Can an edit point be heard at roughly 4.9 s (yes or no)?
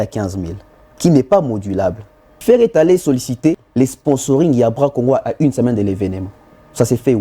no